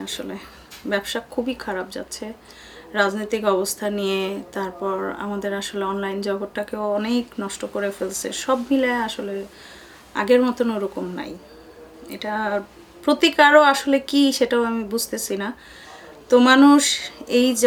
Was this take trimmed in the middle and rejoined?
no; 0 cuts

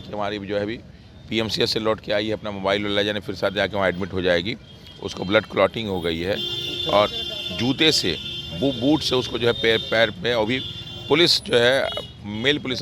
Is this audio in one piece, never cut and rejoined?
yes; 0 cuts

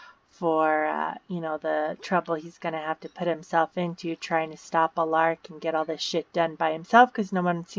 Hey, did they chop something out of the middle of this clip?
no; 0 cuts

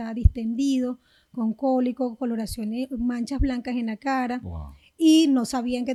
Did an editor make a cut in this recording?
no; 0 cuts

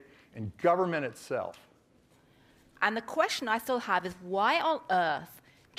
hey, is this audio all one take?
yes; 0 cuts

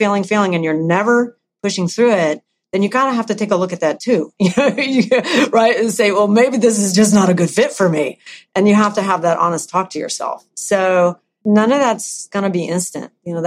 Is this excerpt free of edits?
no; 2 cuts; at 11.4 s, 12.3 s

